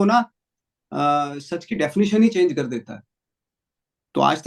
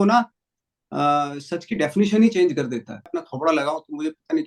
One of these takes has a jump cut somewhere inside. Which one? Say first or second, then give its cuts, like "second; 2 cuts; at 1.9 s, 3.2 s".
second; 1 cut; at 3.1 s